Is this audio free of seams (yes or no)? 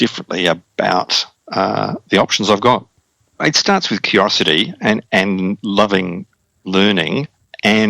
no